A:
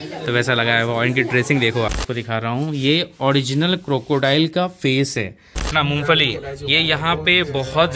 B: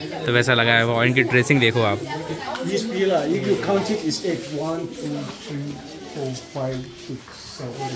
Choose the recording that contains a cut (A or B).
A